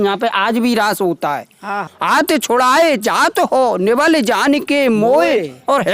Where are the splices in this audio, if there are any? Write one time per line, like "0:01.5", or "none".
0:01.9